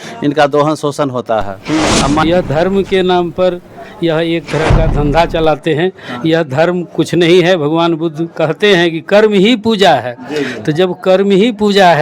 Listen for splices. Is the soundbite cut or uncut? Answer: cut